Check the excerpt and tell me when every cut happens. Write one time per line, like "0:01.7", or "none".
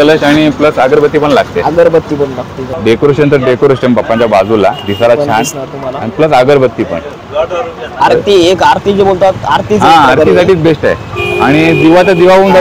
0:02.6
0:07.9